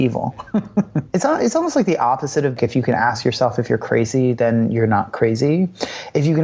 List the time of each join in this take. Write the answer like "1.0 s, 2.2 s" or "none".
1.0 s, 2.6 s